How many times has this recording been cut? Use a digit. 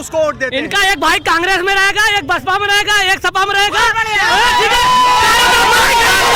0